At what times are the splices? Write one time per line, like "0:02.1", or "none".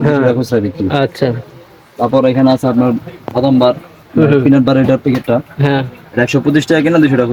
none